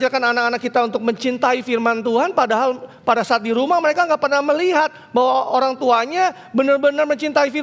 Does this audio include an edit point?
no; 0 cuts

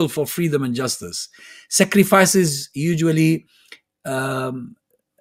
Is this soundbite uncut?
yes; 0 cuts

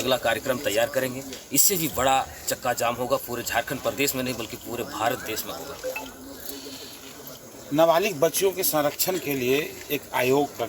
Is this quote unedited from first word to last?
yes; 0 cuts

